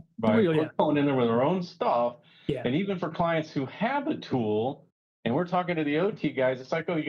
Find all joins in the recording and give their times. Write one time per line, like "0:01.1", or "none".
none